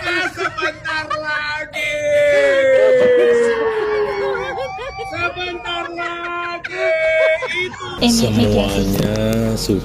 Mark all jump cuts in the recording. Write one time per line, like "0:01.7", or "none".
0:07.9